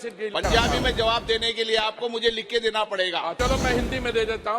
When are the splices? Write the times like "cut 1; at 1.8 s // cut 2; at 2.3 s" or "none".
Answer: cut 1; at 3.3 s

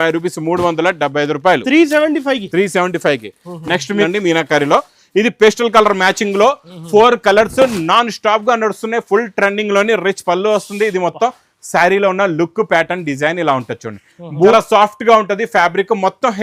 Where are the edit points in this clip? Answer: cut 1; at 4.1 s // cut 2; at 14.5 s

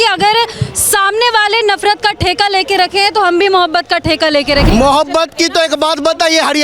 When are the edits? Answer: cut 1; at 4.7 s

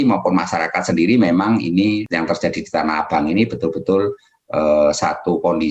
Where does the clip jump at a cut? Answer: cut 1; at 2.0 s

